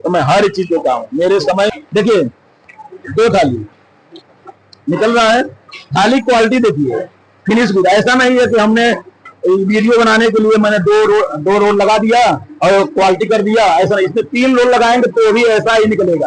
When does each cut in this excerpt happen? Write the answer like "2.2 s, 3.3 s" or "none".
1.7 s